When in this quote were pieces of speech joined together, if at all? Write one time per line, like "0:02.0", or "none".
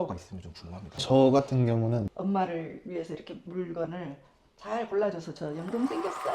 0:02.2